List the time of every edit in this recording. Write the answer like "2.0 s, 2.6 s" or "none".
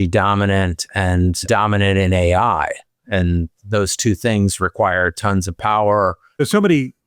1.4 s, 6.4 s